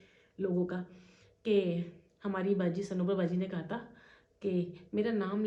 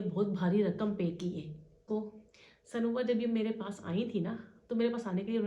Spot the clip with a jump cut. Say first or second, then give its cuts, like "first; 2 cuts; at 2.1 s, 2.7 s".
second; 1 cut; at 1.8 s